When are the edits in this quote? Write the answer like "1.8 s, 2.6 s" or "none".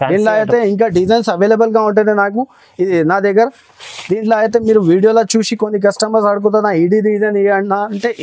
none

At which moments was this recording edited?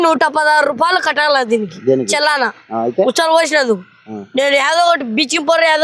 none

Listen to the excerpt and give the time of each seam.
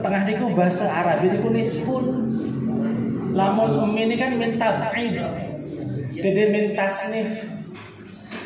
none

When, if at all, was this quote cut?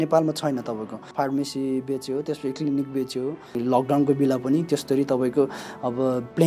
1.1 s, 3.6 s

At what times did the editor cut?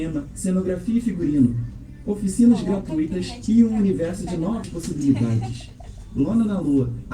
4.7 s

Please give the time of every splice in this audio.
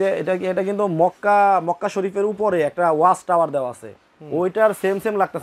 none

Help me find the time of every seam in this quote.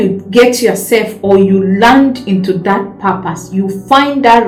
none

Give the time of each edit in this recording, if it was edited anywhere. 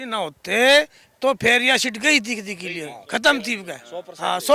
none

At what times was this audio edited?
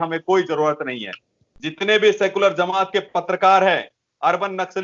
1.4 s

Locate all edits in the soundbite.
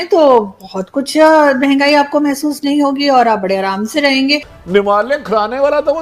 4.6 s

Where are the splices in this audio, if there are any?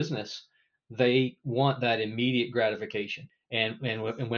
3.2 s

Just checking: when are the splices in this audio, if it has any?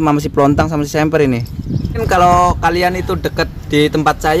2.0 s

